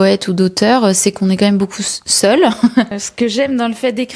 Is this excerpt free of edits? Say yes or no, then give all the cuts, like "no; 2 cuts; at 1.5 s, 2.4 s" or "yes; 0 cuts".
no; 1 cut; at 3.0 s